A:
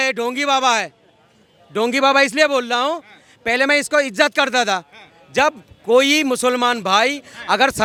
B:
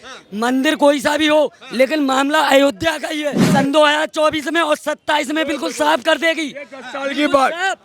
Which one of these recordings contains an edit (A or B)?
B